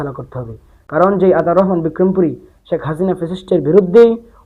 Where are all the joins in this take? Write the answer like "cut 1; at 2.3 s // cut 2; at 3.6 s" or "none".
none